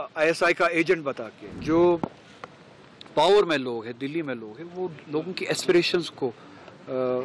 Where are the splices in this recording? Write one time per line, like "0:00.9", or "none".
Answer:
0:01.4